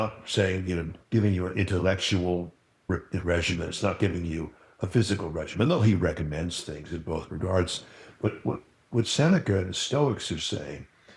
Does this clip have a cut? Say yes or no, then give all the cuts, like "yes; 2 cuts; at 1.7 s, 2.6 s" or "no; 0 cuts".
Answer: yes; 2 cuts; at 0.9 s, 2.9 s